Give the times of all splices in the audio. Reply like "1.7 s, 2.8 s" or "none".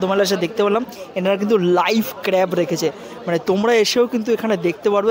none

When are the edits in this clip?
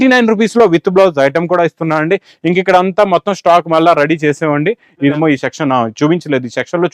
5.1 s

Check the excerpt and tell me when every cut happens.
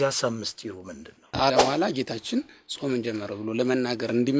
1.5 s

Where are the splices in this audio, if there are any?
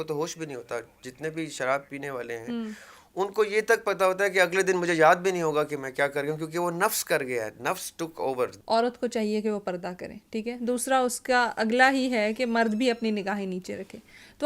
8.6 s

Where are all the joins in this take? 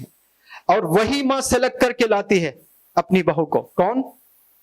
none

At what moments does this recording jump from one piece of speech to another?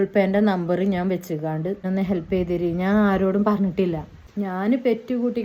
1.8 s, 4.2 s

